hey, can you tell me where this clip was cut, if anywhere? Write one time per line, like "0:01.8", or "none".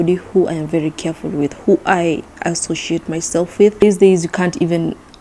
0:03.8